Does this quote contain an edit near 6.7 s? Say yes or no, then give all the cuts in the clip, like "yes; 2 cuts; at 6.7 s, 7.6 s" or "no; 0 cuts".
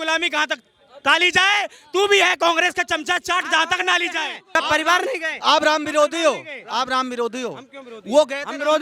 no; 1 cut; at 4.5 s